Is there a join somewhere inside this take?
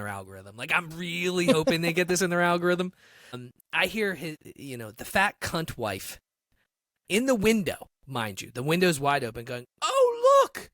yes; 1 cut; at 3.4 s

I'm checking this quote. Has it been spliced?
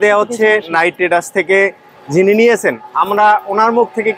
no; 0 cuts

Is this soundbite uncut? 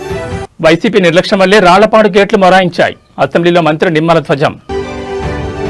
yes; 0 cuts

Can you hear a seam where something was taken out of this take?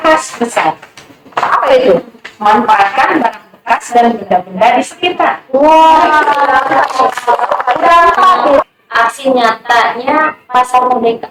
yes; 1 cut; at 8.7 s

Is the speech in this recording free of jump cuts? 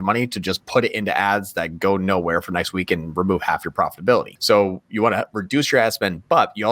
no; 1 cut; at 4.3 s

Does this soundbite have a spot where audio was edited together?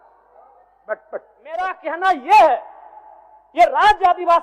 yes; 1 cut; at 1.8 s

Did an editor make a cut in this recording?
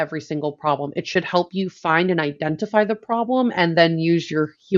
no; 0 cuts

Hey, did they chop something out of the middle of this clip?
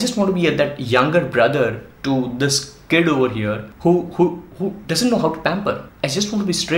yes; 2 cuts; at 3.7 s, 5.9 s

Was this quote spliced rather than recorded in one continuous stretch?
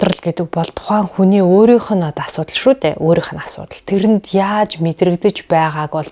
no; 0 cuts

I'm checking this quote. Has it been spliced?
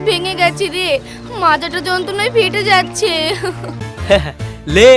yes; 1 cut; at 3.9 s

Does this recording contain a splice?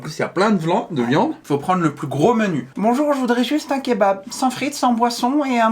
yes; 1 cut; at 1.4 s

